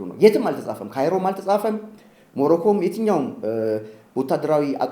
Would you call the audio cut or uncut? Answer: uncut